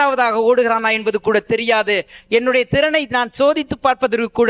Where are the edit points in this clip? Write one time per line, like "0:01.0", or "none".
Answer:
none